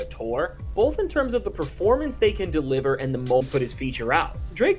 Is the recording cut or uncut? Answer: cut